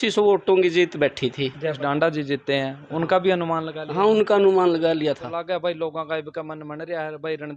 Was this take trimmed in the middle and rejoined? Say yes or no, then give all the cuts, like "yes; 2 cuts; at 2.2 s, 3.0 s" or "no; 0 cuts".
yes; 2 cuts; at 1.8 s, 5.3 s